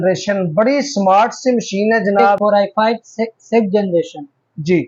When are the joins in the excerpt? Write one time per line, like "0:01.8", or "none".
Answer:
0:02.3